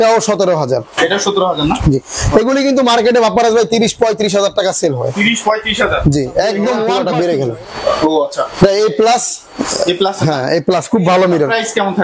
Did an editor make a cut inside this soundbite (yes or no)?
yes